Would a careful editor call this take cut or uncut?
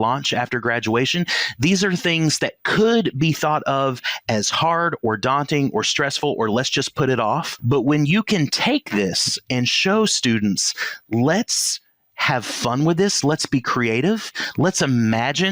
cut